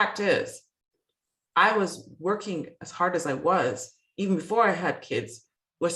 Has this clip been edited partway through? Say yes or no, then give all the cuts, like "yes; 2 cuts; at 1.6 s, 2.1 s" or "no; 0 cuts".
no; 0 cuts